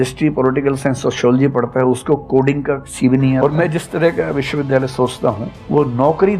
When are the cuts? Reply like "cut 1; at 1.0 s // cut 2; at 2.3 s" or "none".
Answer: cut 1; at 3.4 s